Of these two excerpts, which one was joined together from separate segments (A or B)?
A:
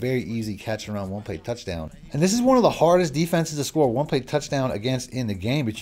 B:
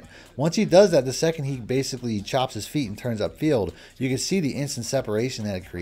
A